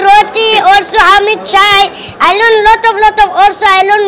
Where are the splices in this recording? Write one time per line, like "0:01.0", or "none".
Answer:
none